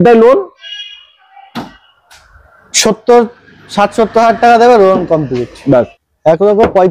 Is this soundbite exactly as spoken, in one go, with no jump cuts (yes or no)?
no